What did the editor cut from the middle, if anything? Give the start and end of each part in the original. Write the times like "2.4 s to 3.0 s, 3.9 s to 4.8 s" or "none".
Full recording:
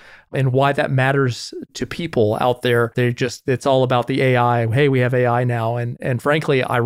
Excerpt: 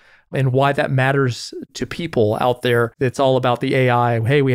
2.9 s to 3.4 s